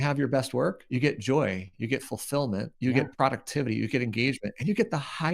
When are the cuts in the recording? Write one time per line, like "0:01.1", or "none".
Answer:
0:00.8
0:01.7
0:02.7